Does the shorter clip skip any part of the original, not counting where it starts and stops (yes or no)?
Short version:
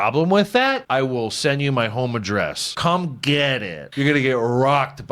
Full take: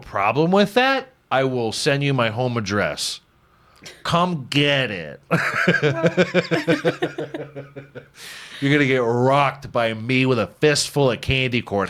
yes